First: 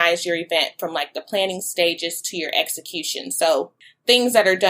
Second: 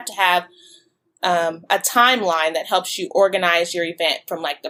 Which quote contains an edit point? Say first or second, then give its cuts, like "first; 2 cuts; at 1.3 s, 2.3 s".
first; 1 cut; at 3.8 s